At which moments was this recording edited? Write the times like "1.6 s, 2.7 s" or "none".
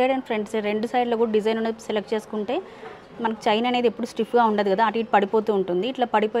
none